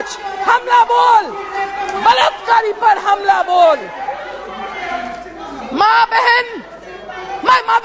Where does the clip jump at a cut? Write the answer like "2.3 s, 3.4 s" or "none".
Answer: none

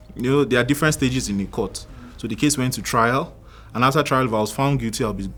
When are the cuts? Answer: none

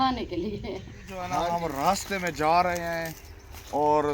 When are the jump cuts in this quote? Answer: 1.2 s

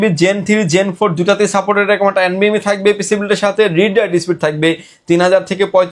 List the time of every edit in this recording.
none

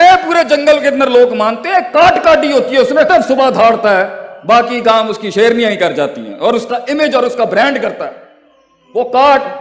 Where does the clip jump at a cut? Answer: 3.1 s

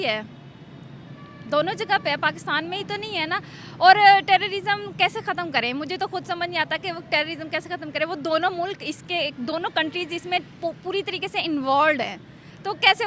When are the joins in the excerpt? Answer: none

